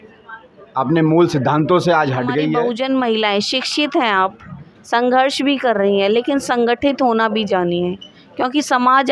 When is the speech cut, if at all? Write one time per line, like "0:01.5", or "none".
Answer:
0:02.6